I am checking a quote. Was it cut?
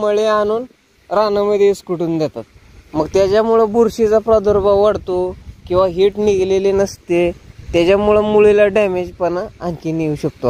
no; 0 cuts

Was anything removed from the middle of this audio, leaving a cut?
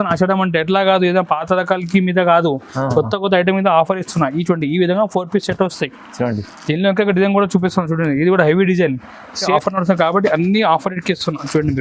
yes; 1 cut; at 9.5 s

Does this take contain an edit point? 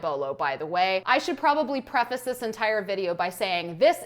yes; 1 cut; at 1.0 s

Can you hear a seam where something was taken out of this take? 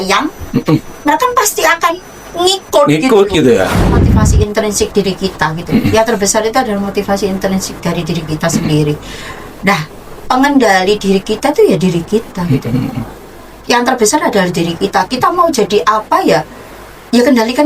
yes; 1 cut; at 4.1 s

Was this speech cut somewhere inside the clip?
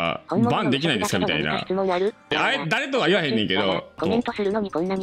yes; 2 cuts; at 2.2 s, 3.9 s

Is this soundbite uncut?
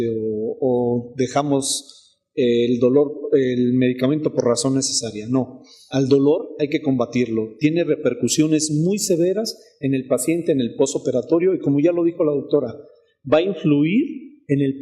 no; 1 cut; at 13.4 s

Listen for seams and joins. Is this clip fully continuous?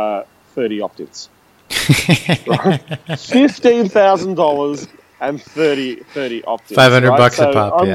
yes; 0 cuts

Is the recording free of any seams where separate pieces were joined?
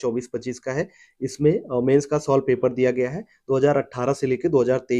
yes; 0 cuts

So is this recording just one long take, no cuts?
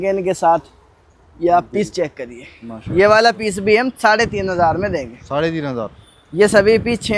yes; 0 cuts

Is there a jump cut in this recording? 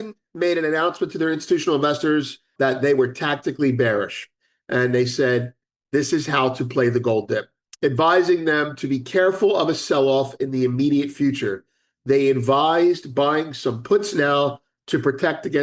yes; 2 cuts; at 2.5 s, 7.6 s

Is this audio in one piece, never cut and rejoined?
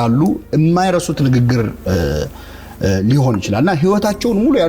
yes; 0 cuts

